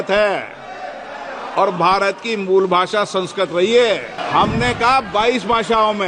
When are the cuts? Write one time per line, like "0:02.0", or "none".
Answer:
0:04.2

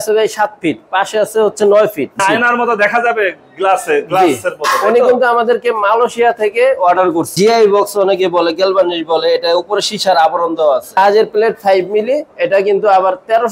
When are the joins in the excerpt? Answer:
0:02.2
0:07.3
0:11.0

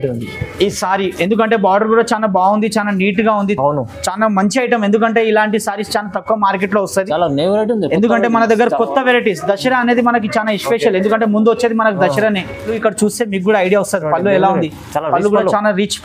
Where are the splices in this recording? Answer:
0:12.7

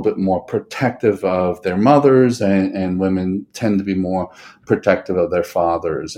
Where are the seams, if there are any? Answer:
none

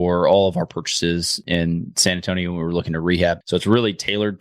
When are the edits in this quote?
0:03.4

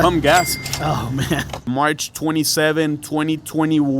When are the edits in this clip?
0:01.7

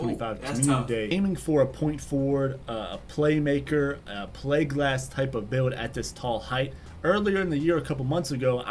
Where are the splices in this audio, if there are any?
0:01.1

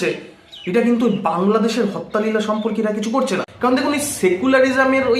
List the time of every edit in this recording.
0:03.5

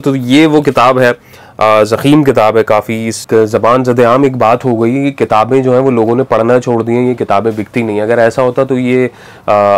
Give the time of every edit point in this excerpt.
0:03.1

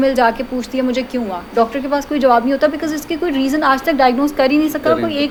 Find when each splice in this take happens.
none

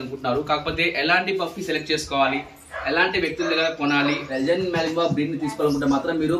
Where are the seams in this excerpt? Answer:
0:04.3

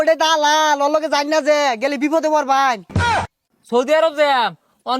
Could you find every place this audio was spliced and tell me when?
0:03.0

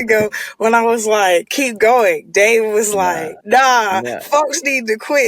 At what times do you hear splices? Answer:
0:01.6
0:03.3

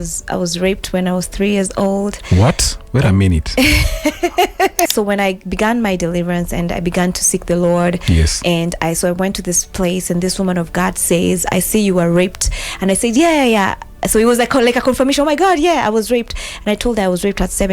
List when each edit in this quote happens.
0:04.9

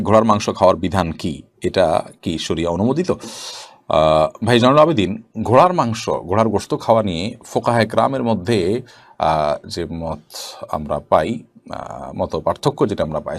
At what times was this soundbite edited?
none

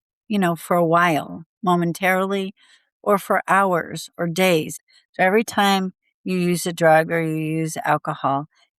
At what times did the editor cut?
0:04.8

